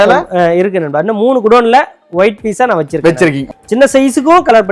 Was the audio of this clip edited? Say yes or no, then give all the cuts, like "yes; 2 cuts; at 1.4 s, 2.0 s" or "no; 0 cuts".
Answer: yes; 1 cut; at 3.4 s